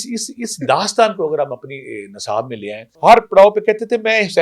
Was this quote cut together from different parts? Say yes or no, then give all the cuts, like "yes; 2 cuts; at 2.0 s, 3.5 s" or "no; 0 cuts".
yes; 1 cut; at 2.9 s